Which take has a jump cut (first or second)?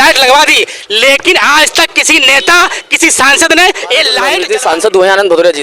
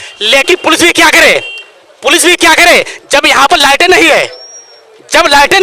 first